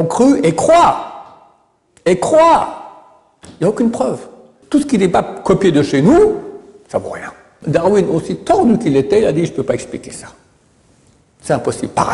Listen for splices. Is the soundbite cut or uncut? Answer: cut